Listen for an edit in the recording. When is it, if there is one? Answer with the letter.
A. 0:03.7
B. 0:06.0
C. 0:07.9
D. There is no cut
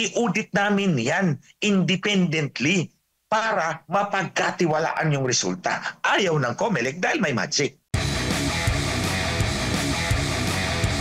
C